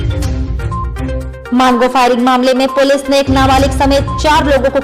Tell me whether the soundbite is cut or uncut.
cut